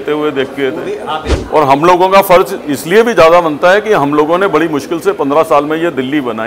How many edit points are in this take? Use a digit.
1